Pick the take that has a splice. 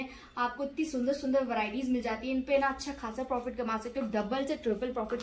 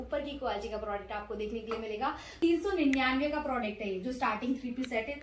second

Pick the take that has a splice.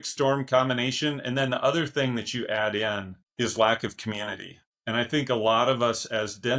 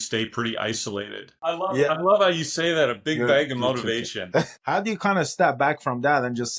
second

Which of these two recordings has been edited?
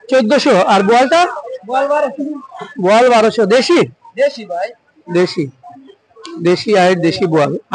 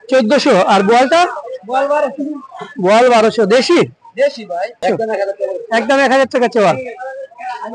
second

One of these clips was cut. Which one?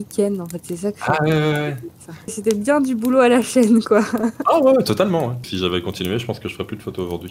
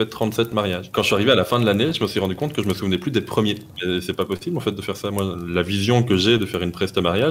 first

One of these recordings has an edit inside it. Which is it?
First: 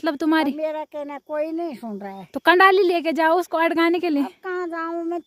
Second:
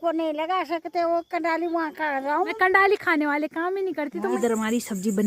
second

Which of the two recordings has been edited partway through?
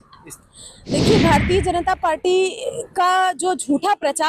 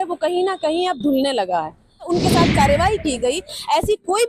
second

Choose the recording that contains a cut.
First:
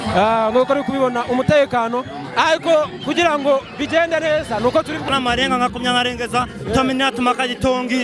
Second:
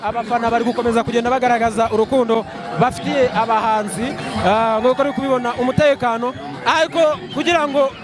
first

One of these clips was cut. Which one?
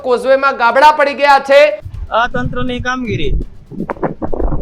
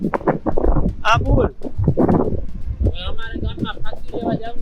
first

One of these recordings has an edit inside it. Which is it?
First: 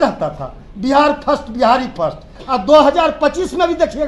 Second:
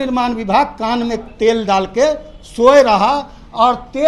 first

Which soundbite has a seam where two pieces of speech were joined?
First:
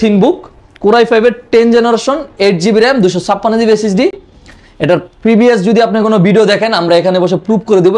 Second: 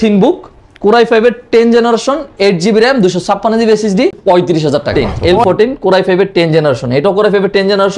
second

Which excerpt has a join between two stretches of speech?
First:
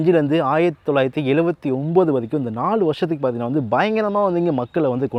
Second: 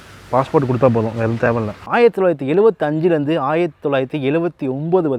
second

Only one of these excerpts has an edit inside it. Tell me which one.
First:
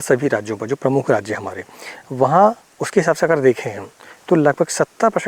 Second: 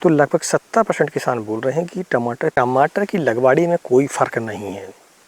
second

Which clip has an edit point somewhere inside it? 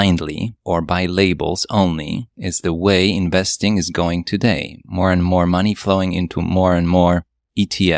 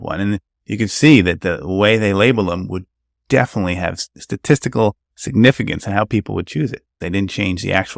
second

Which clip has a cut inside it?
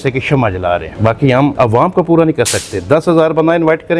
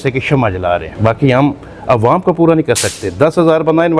first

